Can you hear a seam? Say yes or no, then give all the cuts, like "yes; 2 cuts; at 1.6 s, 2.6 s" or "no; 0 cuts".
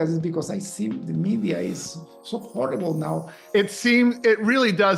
yes; 1 cut; at 3.5 s